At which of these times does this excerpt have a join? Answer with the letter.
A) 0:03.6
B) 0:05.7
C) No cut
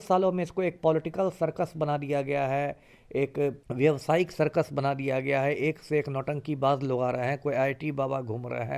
A